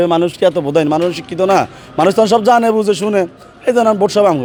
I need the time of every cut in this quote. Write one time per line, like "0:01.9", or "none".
none

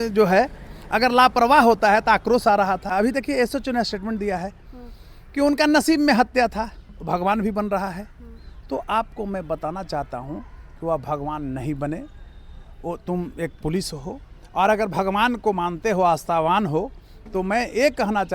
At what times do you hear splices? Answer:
0:02.9

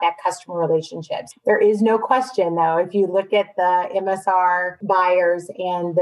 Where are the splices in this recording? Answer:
0:01.2
0:04.7

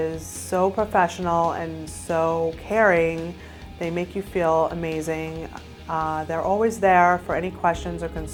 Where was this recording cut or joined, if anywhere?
none

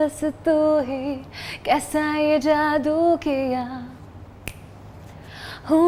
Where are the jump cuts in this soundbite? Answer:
none

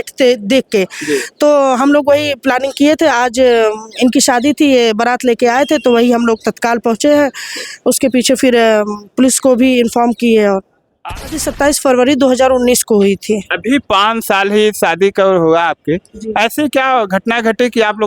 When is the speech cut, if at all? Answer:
0:11.4

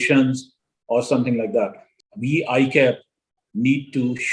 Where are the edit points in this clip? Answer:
0:01.9

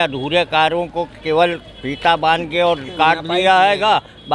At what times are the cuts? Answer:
none

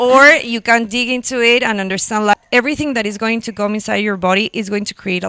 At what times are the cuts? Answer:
0:02.3

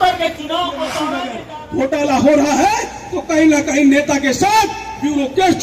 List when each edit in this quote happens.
0:01.5

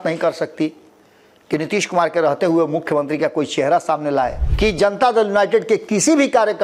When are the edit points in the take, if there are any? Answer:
0:04.4

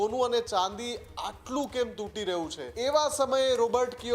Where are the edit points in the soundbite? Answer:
0:02.6

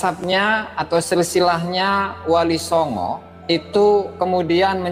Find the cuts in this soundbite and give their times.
0:03.3

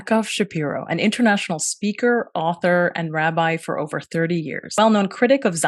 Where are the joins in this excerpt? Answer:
0:04.8

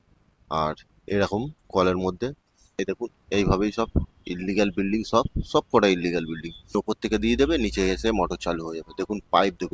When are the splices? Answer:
0:02.7
0:06.7

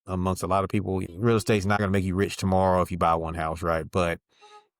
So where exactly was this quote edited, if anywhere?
0:01.1
0:01.8

